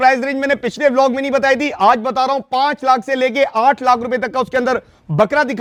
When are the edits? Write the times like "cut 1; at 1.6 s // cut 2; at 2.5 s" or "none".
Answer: none